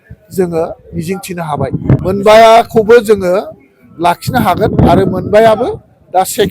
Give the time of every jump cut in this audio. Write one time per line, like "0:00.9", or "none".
0:02.0